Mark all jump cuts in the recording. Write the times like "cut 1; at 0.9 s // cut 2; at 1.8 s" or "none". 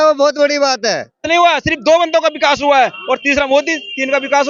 cut 1; at 1.2 s